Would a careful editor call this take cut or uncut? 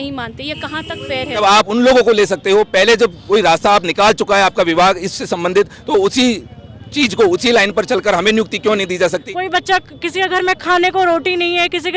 cut